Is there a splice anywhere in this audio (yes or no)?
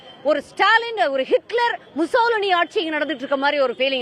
no